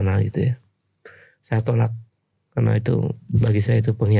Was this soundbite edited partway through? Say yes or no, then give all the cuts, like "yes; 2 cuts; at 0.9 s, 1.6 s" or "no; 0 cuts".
no; 0 cuts